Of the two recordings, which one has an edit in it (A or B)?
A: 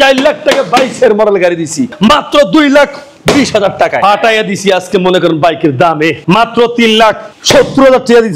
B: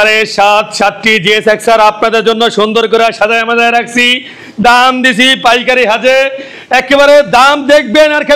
A